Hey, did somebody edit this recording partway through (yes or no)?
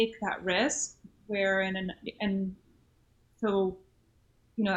no